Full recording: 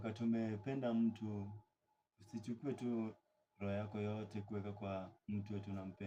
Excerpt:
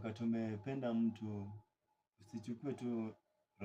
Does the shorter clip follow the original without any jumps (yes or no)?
yes